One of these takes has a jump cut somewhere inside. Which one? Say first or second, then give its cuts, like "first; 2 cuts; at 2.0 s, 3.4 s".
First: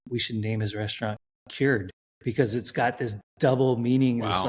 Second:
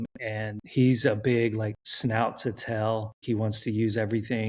second; 1 cut; at 3.1 s